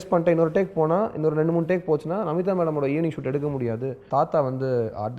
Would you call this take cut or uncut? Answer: cut